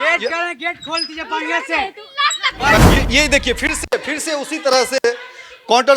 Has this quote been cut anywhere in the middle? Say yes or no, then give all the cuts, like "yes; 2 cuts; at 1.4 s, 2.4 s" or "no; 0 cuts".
no; 0 cuts